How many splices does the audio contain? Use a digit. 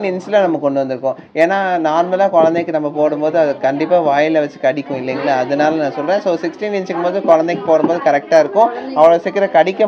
0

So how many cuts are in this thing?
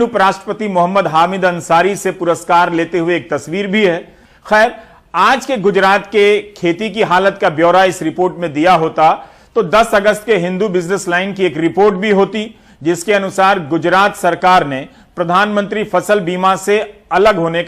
0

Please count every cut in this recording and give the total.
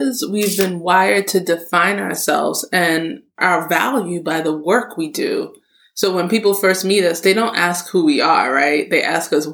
1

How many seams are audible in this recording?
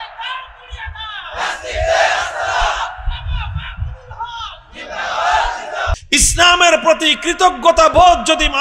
1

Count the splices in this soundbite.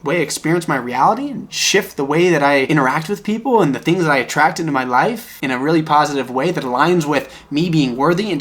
2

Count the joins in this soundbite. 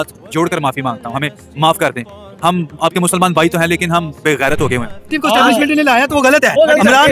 1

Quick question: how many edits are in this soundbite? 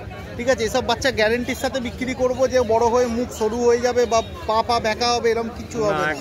0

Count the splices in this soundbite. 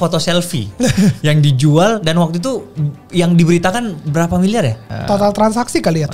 1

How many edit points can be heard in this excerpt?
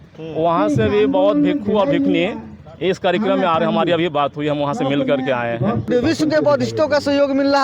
1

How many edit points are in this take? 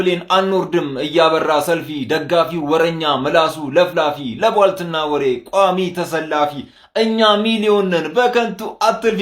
0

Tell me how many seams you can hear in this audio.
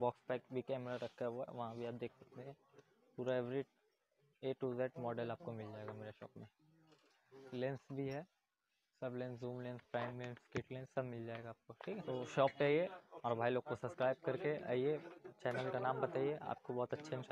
2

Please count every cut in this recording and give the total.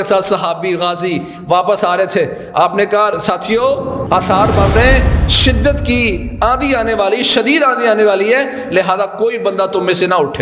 2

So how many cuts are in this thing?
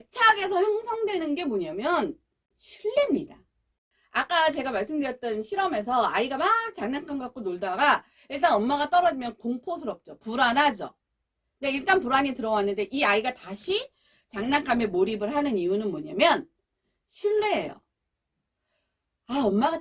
1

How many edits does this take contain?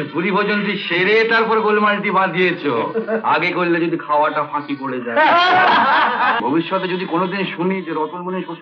1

